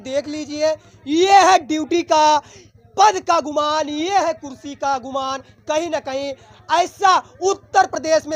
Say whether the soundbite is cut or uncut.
uncut